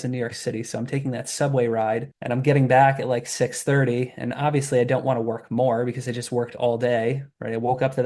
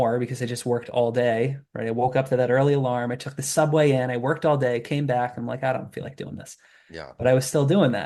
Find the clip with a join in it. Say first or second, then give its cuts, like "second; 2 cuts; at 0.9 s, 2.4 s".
first; 1 cut; at 2.1 s